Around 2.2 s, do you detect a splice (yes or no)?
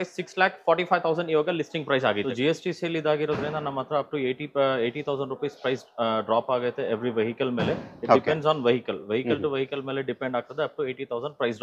yes